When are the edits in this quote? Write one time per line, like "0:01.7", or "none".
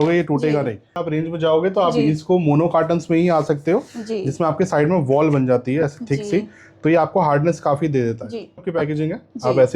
0:01.1
0:08.7